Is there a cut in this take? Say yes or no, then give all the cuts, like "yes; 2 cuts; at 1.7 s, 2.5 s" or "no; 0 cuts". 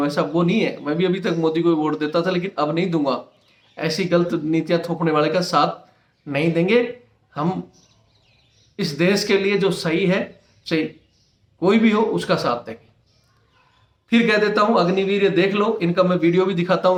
no; 0 cuts